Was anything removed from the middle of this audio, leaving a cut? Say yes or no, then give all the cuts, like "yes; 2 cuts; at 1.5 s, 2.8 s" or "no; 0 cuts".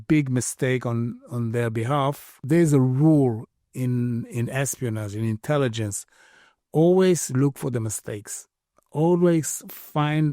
yes; 1 cut; at 2.4 s